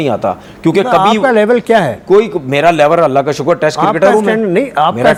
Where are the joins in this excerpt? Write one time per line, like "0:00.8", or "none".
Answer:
none